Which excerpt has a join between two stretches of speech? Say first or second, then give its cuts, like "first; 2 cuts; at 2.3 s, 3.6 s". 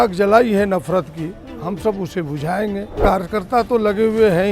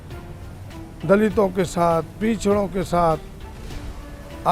first; 1 cut; at 3.0 s